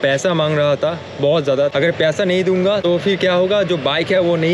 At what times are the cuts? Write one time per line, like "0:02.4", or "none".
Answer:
0:01.7
0:02.8